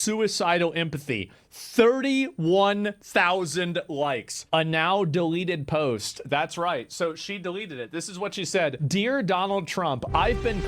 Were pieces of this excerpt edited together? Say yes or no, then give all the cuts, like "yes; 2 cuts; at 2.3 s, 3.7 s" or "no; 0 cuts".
yes; 1 cut; at 6.9 s